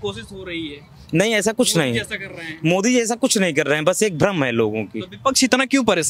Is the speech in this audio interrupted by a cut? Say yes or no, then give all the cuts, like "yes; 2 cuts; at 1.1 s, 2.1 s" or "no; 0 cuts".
no; 0 cuts